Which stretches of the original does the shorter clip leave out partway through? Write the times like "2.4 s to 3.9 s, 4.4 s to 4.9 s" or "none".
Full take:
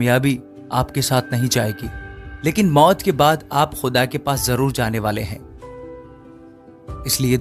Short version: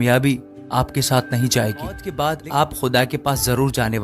2.1 s to 3.1 s

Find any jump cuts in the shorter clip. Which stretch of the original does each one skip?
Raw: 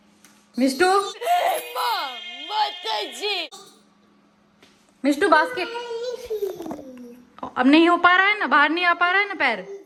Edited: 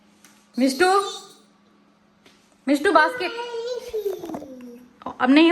1.1 s to 3.5 s

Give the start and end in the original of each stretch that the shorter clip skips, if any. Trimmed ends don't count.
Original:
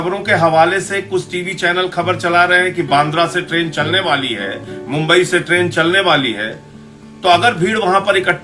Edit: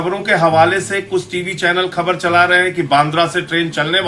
none

